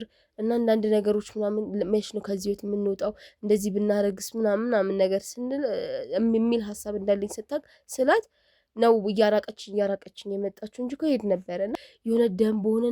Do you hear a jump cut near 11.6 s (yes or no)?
yes